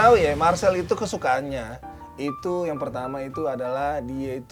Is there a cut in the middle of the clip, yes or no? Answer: no